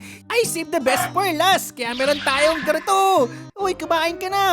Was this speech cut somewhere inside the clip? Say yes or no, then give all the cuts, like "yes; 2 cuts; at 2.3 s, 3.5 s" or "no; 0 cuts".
yes; 1 cut; at 3.5 s